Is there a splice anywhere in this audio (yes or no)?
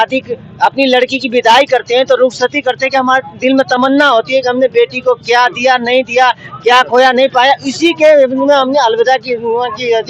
no